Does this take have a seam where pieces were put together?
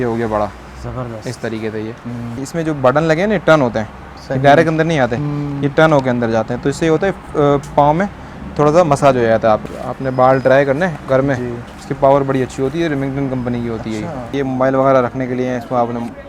yes; 4 cuts; at 2.4 s, 9.8 s, 11.7 s, 14.3 s

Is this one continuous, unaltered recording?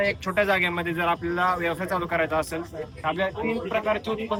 yes; 0 cuts

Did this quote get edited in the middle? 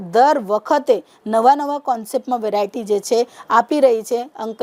no; 0 cuts

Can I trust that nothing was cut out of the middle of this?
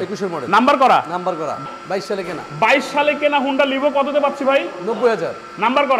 no; 1 cut; at 1.6 s

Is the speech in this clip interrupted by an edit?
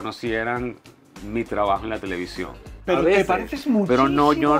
yes; 1 cut; at 2.7 s

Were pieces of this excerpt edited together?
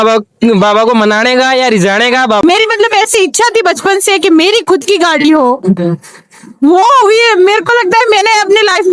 yes; 1 cut; at 2.4 s

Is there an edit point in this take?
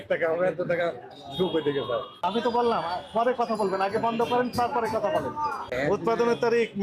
yes; 2 cuts; at 2.2 s, 5.7 s

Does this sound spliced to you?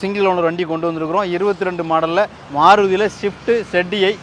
yes; 1 cut; at 2.4 s

